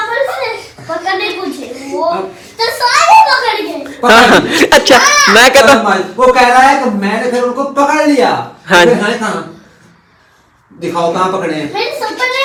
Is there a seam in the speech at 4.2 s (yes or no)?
no